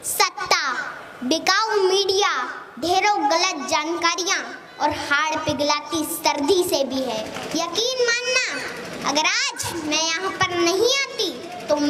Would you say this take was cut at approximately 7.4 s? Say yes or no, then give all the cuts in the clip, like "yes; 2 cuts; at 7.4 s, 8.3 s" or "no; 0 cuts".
yes; 1 cut; at 7.4 s